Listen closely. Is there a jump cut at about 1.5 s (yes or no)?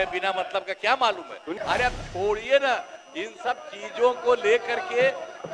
yes